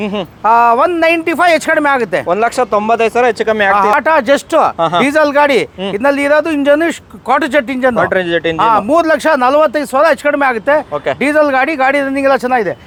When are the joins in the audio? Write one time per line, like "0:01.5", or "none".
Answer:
none